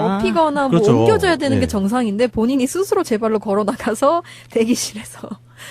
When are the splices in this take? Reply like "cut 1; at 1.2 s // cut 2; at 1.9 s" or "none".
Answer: cut 1; at 3.5 s